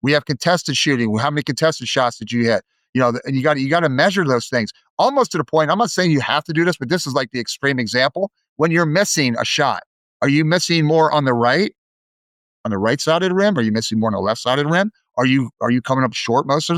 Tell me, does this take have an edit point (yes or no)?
no